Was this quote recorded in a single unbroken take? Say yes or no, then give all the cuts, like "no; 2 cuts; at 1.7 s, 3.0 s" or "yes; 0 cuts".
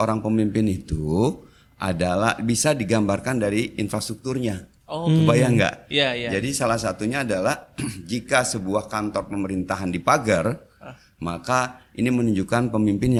yes; 0 cuts